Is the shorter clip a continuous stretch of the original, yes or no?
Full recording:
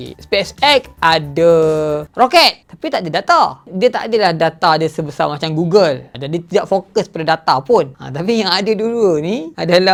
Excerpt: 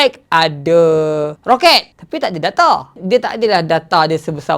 yes